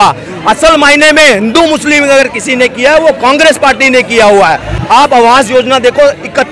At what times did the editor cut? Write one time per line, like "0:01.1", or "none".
0:04.7